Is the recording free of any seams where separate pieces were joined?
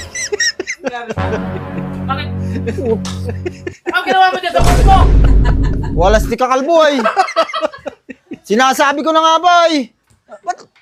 yes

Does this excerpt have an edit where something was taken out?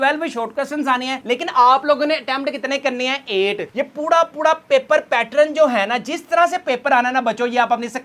no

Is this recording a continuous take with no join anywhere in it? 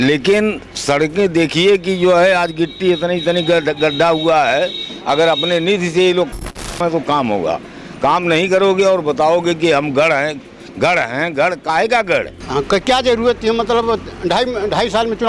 no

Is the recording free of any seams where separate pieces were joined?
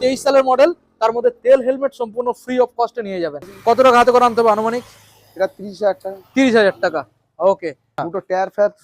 no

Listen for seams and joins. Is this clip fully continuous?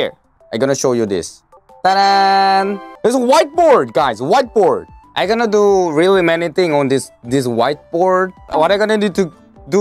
yes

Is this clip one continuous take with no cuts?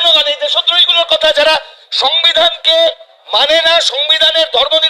yes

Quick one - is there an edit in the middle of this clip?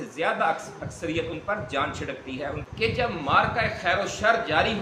yes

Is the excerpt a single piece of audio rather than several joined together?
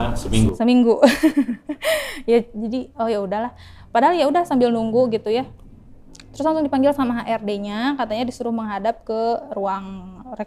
yes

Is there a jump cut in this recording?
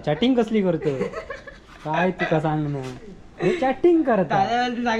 no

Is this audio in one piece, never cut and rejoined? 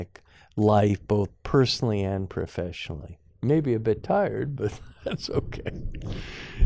yes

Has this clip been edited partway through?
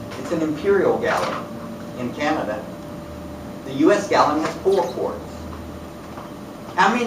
no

